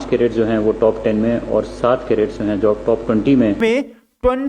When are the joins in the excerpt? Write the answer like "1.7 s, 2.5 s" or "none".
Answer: 3.6 s